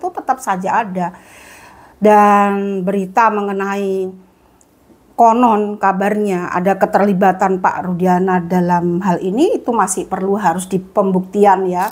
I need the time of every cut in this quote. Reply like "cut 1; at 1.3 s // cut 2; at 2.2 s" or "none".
none